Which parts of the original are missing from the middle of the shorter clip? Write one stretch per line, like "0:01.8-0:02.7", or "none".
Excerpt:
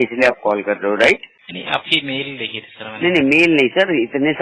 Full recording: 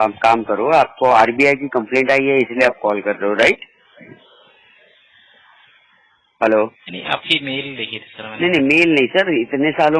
0:03.8-0:06.8